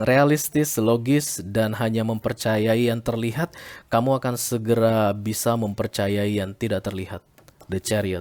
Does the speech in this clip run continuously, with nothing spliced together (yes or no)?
yes